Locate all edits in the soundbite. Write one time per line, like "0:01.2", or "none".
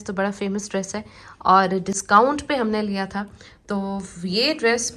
none